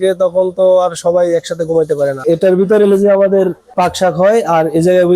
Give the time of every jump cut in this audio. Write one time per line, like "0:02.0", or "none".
0:02.2
0:03.6